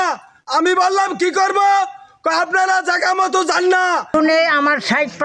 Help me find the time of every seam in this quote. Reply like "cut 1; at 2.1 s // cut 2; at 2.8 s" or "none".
cut 1; at 4.1 s